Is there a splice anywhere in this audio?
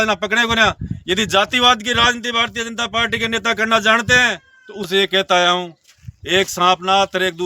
yes; 1 cut; at 4.9 s

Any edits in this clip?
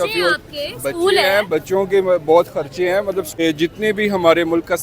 yes; 1 cut; at 3.3 s

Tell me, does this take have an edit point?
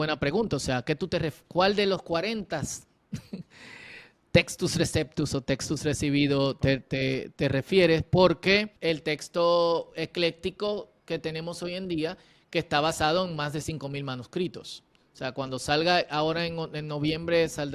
yes; 1 cut; at 8.7 s

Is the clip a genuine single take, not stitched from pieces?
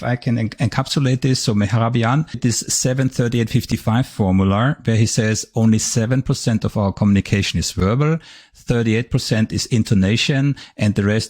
no; 1 cut; at 2.4 s

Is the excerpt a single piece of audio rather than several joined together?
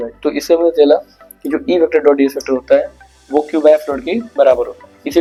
yes; 0 cuts

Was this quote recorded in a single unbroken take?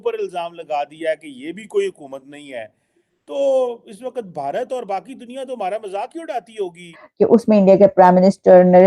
no; 1 cut; at 7.0 s

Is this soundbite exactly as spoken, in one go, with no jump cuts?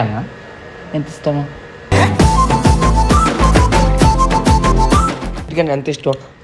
no; 1 cut; at 5.5 s

